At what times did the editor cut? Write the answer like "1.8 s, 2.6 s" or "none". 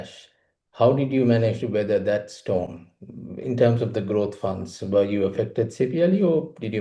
none